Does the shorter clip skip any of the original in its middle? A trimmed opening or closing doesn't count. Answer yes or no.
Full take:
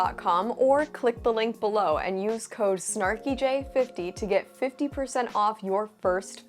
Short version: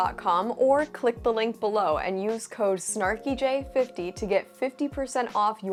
no